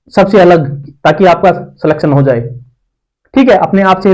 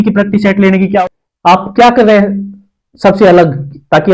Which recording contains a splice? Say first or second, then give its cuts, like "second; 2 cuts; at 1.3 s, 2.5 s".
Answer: second; 1 cut; at 1.0 s